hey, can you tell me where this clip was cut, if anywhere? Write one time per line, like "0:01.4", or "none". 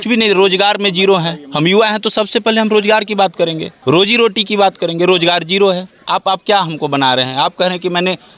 0:03.7
0:05.9

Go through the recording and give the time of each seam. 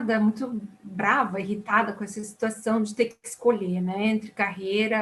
none

